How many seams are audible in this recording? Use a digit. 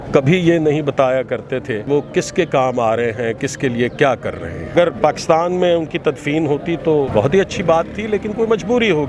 3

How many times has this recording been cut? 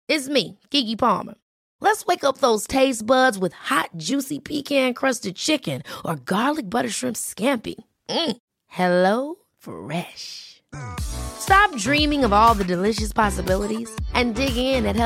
0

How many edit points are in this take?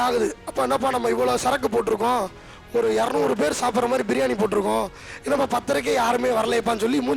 0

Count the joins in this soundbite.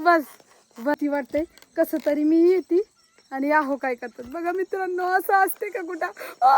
1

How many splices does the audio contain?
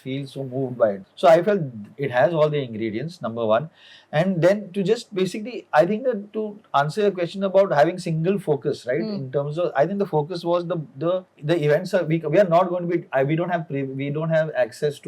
0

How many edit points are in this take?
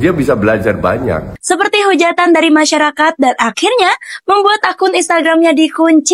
1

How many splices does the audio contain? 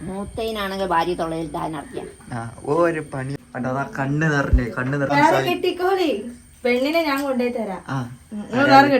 2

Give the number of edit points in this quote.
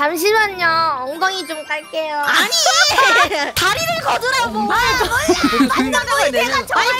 1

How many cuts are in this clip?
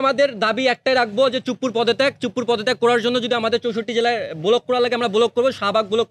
0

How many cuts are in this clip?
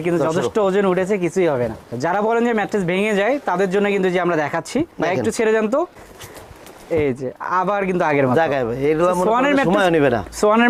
0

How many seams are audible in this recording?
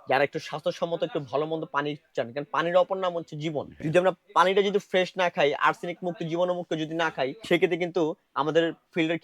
2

